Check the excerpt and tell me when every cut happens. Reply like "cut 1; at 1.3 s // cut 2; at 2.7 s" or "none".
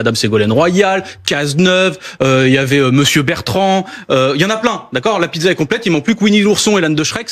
none